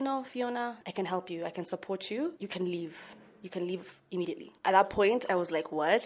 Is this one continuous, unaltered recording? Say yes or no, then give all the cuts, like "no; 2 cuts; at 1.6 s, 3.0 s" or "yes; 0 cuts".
no; 1 cut; at 2.4 s